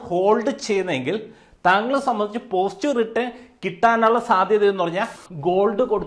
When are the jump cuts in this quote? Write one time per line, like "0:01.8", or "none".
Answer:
0:05.2